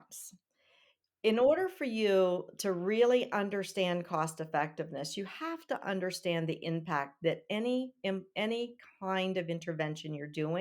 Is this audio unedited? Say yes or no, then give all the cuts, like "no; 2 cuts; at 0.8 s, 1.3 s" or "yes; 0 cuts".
yes; 0 cuts